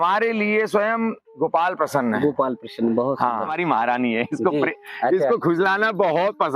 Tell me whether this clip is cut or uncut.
cut